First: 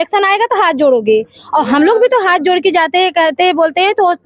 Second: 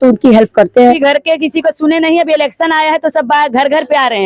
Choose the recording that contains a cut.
second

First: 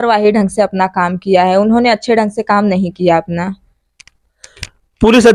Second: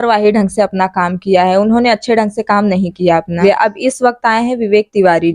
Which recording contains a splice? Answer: second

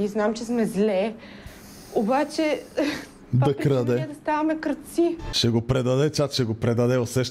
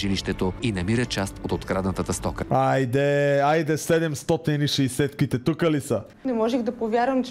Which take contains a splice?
second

